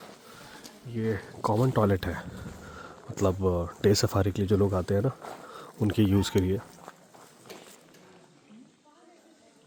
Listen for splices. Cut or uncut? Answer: uncut